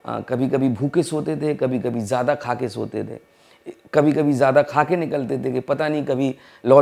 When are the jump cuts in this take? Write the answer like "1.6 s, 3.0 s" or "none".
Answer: none